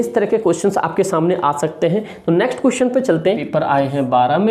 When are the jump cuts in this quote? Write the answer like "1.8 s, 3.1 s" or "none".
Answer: 3.4 s